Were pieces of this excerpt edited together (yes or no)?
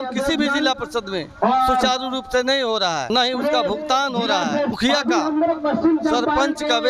yes